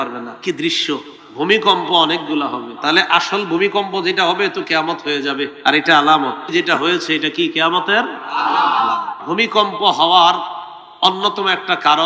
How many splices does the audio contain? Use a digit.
5